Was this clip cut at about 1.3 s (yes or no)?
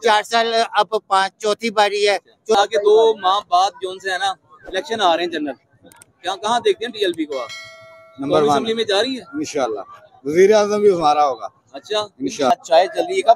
no